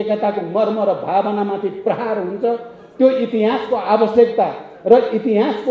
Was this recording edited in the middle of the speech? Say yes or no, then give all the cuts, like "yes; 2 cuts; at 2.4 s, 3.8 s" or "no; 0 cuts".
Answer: no; 0 cuts